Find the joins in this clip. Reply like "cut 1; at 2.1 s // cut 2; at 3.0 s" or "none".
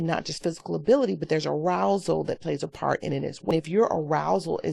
cut 1; at 3.5 s